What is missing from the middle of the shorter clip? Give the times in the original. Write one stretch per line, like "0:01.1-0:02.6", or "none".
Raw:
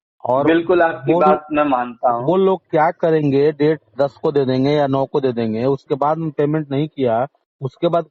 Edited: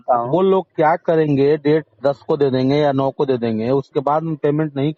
none

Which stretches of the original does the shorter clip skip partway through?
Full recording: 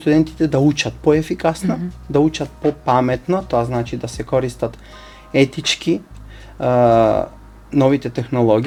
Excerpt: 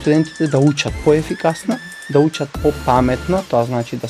none

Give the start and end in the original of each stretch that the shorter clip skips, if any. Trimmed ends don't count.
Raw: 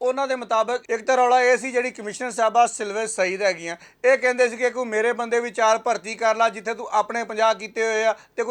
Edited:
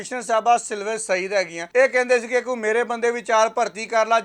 0:03.7-0:03.9

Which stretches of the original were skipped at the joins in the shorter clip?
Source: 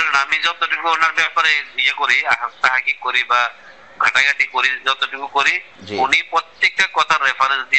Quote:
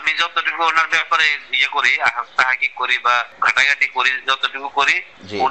0:03.6-0:03.9

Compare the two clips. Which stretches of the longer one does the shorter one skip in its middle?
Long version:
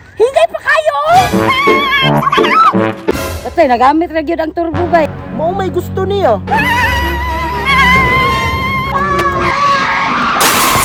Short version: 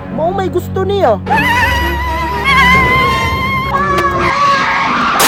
none

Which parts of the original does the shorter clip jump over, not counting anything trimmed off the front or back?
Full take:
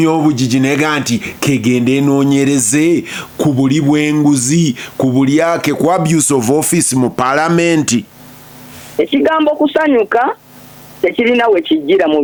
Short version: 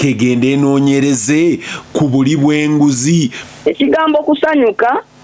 0:04.8-0:08.7

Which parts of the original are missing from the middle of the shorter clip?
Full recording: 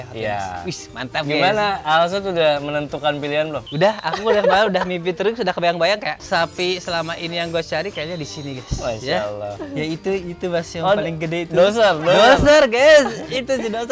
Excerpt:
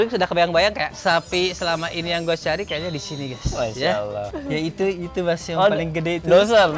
none

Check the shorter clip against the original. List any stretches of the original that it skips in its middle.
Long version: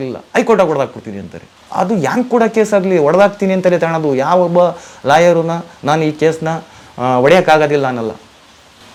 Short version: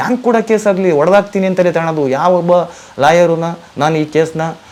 none

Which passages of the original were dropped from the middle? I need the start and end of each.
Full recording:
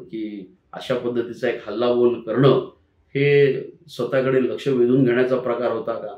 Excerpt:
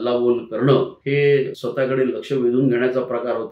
0:02.7-0:03.1
0:03.7-0:04.0

